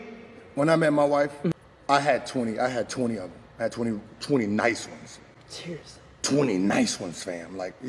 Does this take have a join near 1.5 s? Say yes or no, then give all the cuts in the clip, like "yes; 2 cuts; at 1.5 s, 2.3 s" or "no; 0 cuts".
yes; 1 cut; at 1.5 s